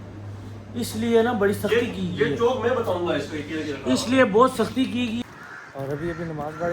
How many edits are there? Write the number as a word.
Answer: one